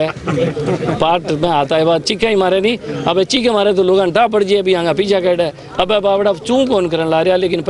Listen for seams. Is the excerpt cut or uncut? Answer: uncut